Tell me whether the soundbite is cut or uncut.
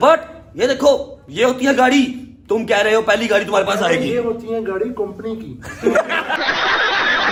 uncut